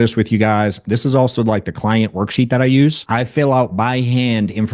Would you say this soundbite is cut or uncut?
cut